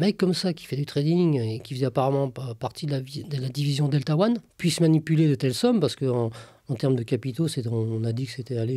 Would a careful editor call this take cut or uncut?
uncut